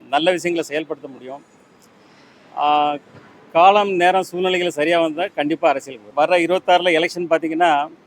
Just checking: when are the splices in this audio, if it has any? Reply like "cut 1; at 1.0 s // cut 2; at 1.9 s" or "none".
cut 1; at 6.0 s